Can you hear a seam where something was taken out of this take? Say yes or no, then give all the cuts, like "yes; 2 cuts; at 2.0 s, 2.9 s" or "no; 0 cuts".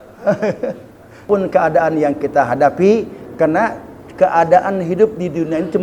yes; 1 cut; at 1.2 s